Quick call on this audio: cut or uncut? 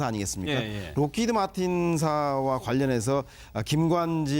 cut